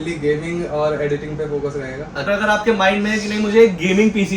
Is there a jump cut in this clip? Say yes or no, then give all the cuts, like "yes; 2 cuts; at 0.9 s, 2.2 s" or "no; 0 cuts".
yes; 1 cut; at 2.3 s